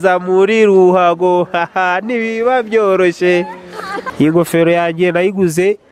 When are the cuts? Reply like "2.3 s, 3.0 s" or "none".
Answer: 4.1 s